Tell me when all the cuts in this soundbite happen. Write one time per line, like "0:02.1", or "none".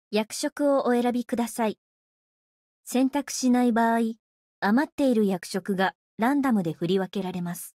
none